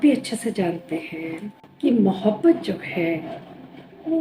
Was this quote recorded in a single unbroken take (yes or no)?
no